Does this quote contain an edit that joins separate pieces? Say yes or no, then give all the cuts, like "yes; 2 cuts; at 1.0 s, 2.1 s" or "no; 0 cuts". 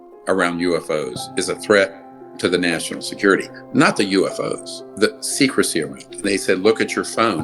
yes; 2 cuts; at 4.9 s, 6.0 s